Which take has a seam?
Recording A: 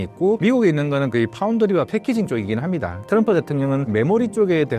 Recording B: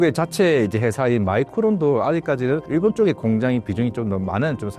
A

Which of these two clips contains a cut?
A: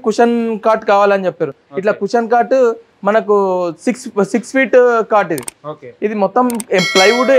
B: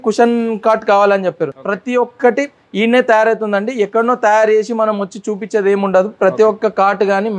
B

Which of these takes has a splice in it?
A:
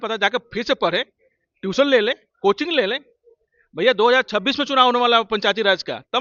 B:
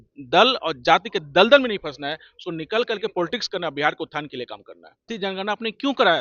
B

